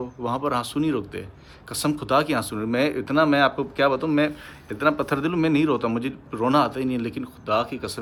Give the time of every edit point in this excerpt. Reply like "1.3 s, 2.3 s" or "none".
none